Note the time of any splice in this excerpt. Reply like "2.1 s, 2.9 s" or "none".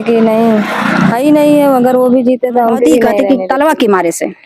3.1 s

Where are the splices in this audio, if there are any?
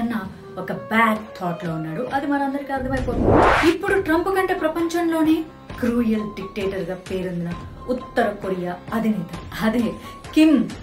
3.5 s

